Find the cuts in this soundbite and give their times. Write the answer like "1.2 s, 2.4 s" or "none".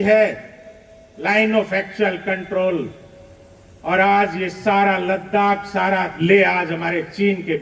6.2 s